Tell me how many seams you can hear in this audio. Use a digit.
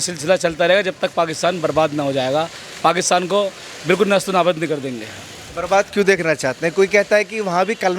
0